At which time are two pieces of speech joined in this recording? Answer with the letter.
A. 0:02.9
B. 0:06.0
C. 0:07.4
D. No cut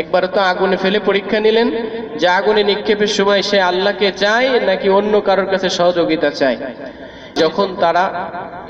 C